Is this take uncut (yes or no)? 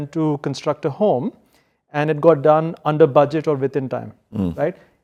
yes